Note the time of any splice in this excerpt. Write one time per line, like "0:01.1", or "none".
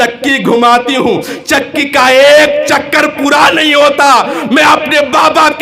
none